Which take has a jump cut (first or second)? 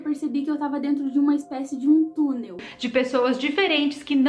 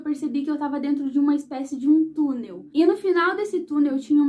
first